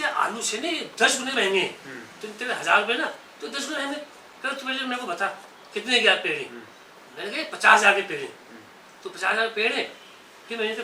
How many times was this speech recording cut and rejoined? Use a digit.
0